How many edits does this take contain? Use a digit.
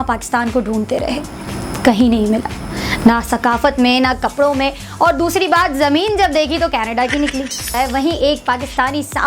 1